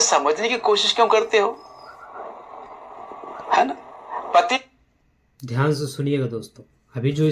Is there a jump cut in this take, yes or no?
no